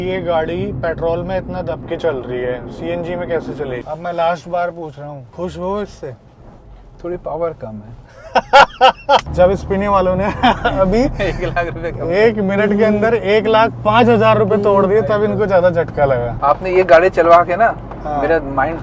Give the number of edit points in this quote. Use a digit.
4